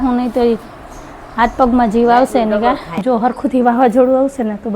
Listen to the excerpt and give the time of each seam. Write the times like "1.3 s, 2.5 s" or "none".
3.0 s